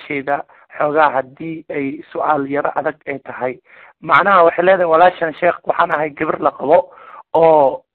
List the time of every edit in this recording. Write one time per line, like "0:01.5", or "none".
none